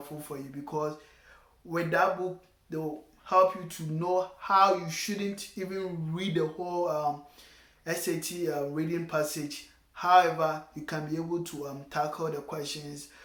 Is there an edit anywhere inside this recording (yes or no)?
no